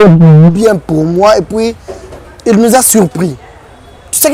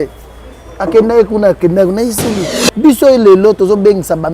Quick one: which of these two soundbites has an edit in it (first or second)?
second